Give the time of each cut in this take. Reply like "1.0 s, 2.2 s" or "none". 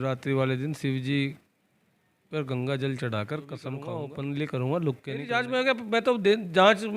3.9 s, 5.4 s